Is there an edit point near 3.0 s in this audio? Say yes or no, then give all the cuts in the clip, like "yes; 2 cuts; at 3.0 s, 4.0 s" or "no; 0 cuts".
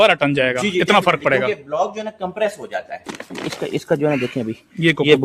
yes; 1 cut; at 3.0 s